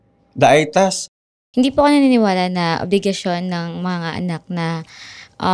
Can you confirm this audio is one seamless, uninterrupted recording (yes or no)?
no